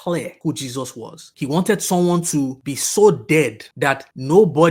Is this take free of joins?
yes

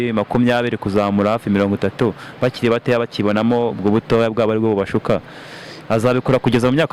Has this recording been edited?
no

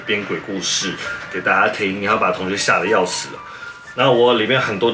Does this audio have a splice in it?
no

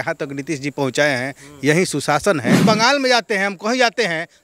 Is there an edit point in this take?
yes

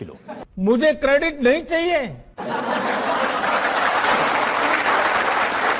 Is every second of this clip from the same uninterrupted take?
yes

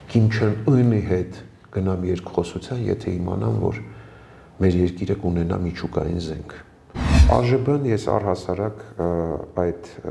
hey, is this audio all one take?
no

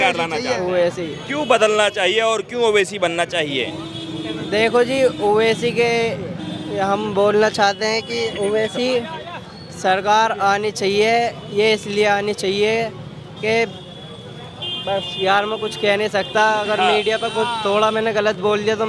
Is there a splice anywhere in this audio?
no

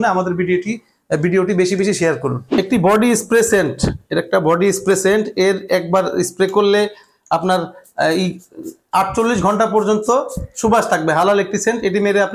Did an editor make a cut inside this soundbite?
yes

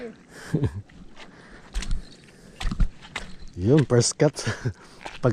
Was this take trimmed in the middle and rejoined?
no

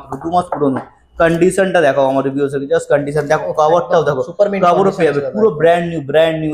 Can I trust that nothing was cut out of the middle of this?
yes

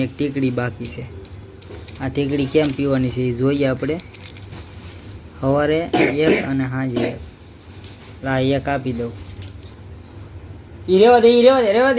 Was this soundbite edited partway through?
no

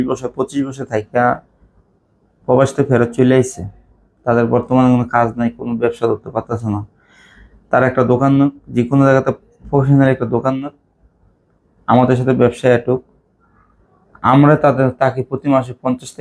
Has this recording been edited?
no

